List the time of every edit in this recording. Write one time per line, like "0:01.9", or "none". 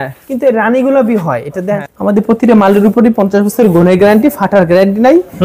0:01.8